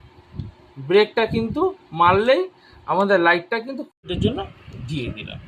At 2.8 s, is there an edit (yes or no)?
no